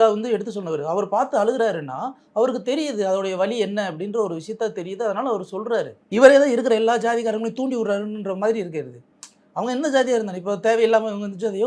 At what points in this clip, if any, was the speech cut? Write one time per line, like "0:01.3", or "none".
0:06.0